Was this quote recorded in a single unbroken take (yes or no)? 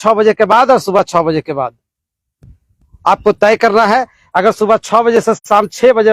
yes